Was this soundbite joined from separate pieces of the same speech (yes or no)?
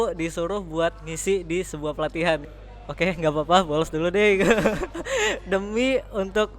yes